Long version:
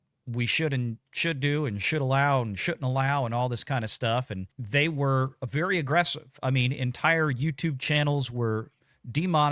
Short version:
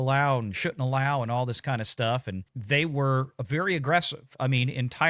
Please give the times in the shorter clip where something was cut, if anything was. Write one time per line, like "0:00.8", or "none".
none